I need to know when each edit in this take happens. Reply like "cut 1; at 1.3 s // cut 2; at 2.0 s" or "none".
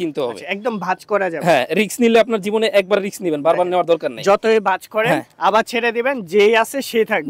none